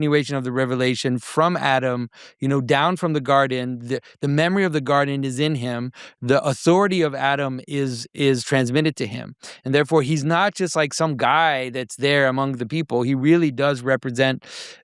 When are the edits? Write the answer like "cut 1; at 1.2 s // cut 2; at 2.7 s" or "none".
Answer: none

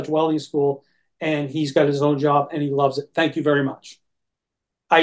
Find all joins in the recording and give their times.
none

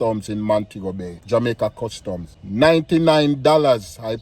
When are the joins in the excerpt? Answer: cut 1; at 1.1 s

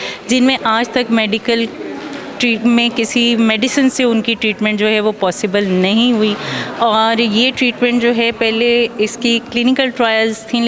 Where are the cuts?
none

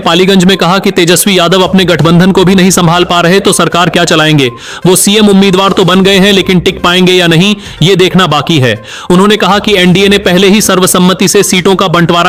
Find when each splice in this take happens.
none

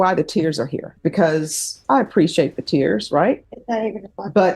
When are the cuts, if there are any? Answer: cut 1; at 0.9 s // cut 2; at 1.8 s // cut 3; at 3.5 s

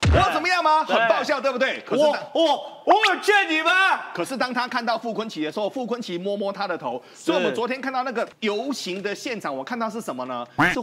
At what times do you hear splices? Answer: cut 1; at 8.3 s

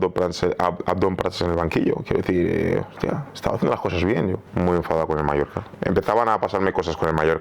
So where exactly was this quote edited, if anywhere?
cut 1; at 4.4 s // cut 2; at 5.7 s

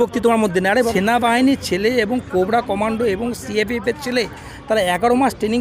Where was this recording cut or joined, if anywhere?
cut 1; at 0.9 s

